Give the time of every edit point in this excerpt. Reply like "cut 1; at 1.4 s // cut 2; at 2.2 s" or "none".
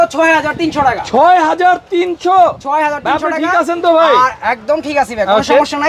none